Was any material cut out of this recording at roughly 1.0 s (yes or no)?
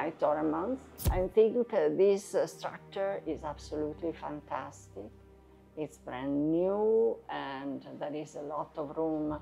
yes